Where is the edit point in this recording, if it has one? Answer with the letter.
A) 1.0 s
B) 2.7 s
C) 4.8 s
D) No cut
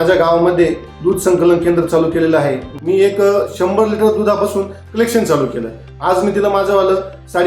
B